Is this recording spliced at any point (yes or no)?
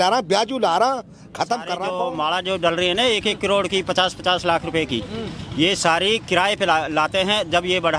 yes